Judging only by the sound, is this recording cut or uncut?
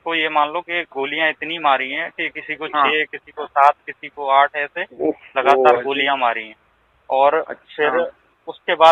uncut